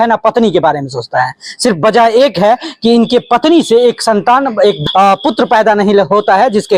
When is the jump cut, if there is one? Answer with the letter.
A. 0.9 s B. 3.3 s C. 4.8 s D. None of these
C